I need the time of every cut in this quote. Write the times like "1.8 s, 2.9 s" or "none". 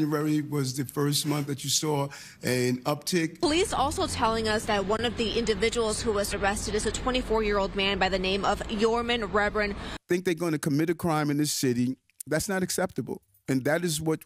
3.3 s, 9.9 s